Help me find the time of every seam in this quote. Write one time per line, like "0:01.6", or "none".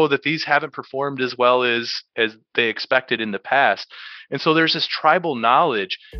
none

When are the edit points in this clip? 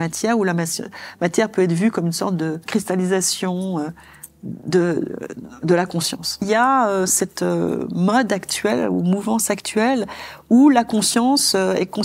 0:02.7
0:06.5

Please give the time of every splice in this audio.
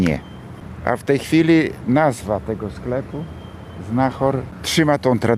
0:04.5

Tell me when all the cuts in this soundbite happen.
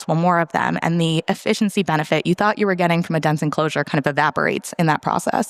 none

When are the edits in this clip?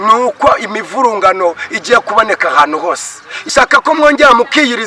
0:03.5

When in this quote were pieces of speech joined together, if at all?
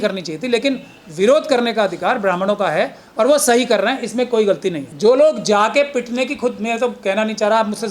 0:04.9

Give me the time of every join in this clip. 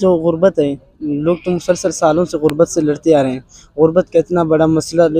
none

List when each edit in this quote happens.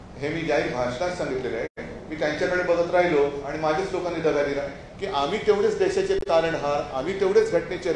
0:04.8

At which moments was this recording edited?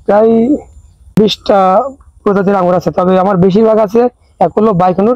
0:01.2

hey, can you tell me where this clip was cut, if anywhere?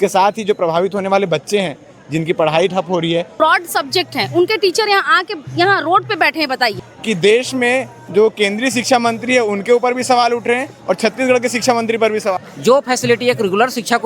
0:03.3
0:06.9
0:12.4

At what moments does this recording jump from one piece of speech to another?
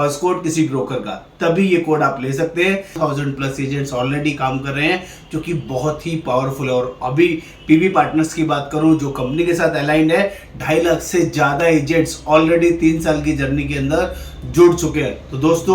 0:03.0

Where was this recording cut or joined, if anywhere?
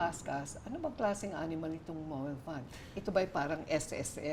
none

